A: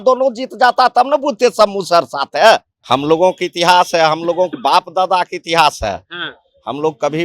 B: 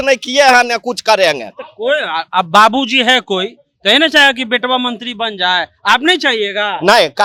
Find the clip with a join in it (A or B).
A